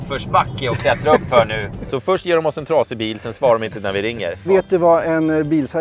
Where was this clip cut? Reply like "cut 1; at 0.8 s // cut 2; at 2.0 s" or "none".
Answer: cut 1; at 1.8 s // cut 2; at 4.4 s